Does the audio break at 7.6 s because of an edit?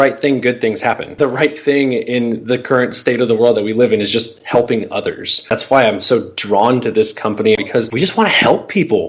yes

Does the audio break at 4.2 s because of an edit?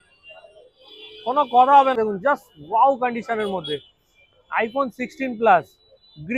no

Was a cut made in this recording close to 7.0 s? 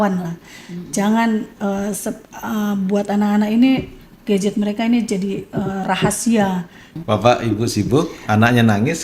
yes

